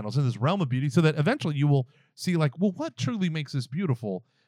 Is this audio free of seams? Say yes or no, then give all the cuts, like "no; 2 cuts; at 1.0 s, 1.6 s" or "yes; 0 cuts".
yes; 0 cuts